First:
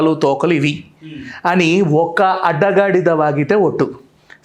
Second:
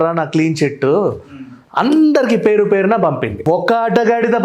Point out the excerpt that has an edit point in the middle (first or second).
second